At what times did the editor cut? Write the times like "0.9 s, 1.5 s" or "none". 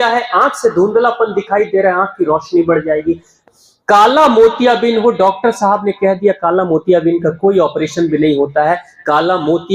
3.4 s